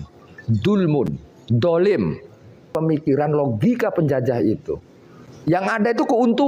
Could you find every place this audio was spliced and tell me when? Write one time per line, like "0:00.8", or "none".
0:02.6